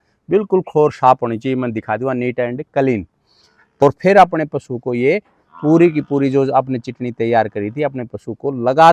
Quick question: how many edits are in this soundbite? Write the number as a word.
one